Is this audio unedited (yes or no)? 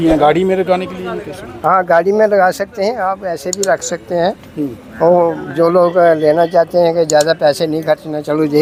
yes